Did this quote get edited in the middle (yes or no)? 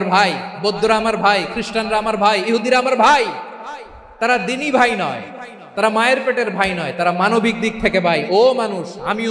no